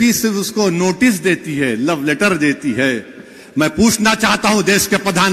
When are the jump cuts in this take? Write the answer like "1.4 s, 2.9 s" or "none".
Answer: none